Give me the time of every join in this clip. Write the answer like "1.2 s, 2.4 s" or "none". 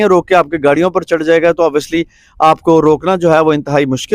none